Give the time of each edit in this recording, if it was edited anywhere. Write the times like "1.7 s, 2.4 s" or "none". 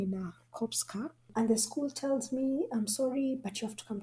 1.3 s